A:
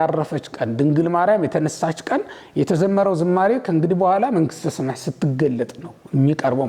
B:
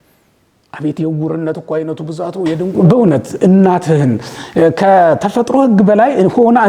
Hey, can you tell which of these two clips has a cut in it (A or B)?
B